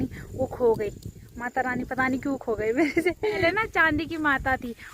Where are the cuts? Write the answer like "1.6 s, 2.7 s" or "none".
3.4 s